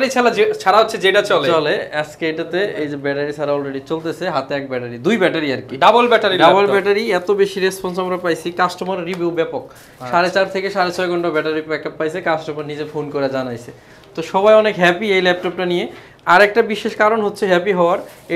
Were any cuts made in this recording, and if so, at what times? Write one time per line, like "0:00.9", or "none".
none

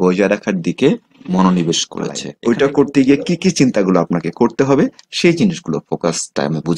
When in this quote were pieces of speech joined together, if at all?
0:02.3

